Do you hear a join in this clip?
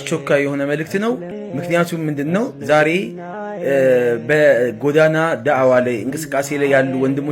yes; 1 cut; at 1.3 s

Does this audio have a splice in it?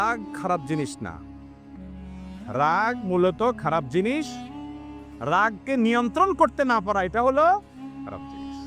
yes; 1 cut; at 7.7 s

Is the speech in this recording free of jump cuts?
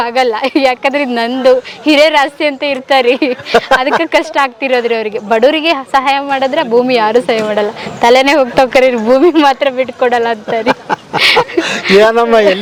yes; 0 cuts

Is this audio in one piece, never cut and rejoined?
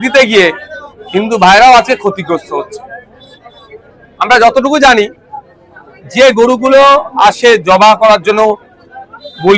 yes; 0 cuts

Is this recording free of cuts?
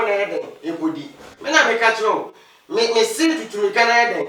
yes; 0 cuts

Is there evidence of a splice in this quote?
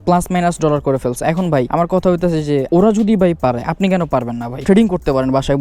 yes; 1 cut; at 4.6 s

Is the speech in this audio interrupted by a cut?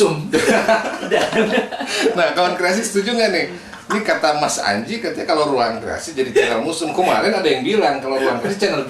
no; 0 cuts

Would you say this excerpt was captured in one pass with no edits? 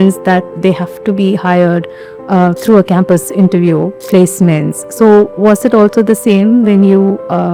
yes; 0 cuts

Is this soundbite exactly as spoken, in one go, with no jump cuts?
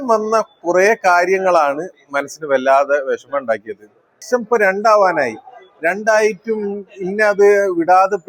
no; 1 cut; at 4.2 s

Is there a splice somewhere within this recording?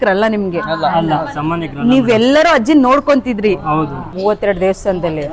yes; 1 cut; at 4.0 s

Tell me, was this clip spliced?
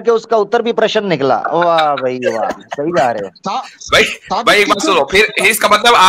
no; 0 cuts

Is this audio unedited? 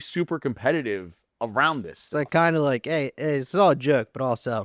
yes; 0 cuts

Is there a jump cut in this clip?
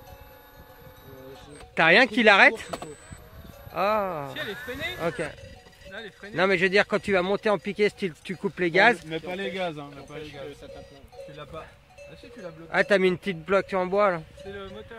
yes; 1 cut; at 10.4 s

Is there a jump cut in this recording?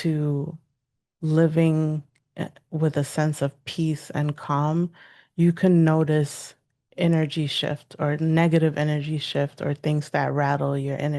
no; 0 cuts

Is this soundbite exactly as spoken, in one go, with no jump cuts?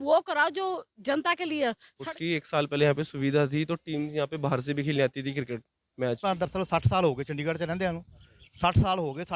no; 2 cuts; at 2.1 s, 6.2 s

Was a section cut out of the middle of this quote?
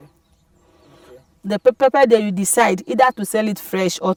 no; 0 cuts

